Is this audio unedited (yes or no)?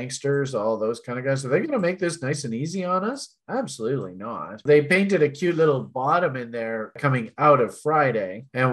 no